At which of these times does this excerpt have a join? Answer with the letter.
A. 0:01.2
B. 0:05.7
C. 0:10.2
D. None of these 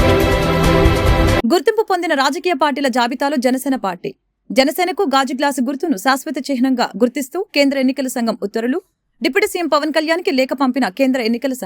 A